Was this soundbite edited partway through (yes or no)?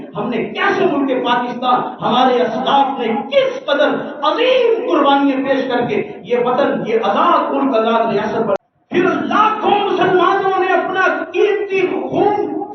yes